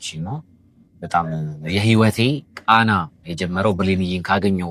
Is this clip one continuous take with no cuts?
yes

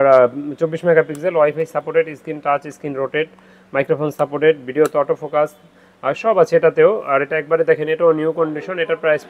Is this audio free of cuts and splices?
yes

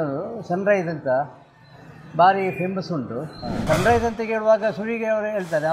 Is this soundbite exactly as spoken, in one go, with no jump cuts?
no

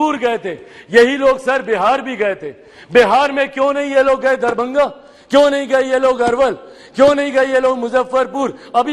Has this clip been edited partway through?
no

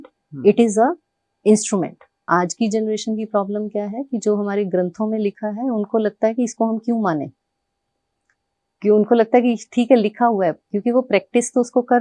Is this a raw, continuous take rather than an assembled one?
no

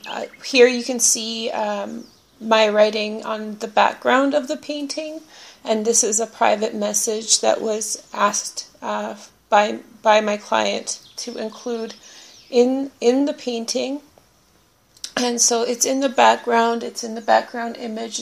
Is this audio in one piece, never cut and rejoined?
no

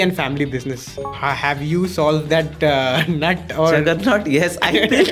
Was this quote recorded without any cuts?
no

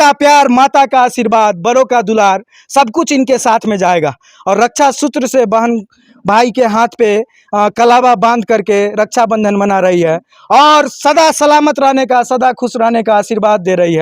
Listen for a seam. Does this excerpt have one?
no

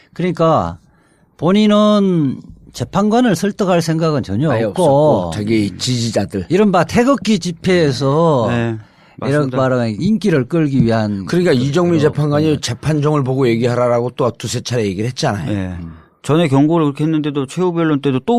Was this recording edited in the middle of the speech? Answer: no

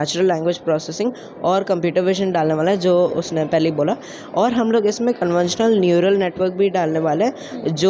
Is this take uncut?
yes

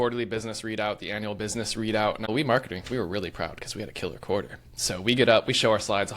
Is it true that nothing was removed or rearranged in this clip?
no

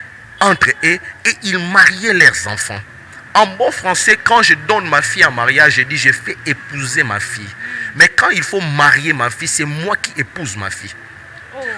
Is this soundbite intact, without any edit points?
yes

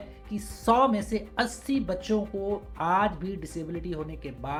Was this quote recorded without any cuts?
yes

